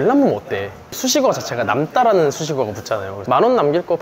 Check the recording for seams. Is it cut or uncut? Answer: cut